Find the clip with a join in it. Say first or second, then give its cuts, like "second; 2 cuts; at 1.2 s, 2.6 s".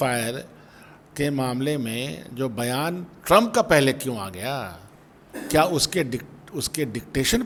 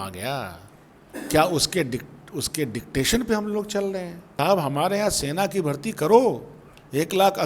second; 1 cut; at 4.2 s